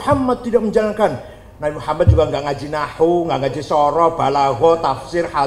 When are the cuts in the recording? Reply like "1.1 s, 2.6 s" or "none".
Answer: none